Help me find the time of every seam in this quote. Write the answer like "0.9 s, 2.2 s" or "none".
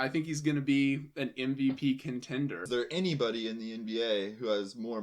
2.7 s